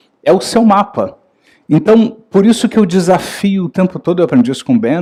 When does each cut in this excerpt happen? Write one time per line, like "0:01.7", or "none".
none